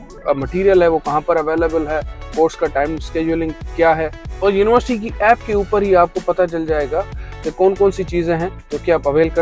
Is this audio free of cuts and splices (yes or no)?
yes